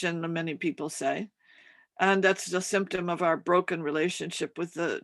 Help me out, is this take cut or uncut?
uncut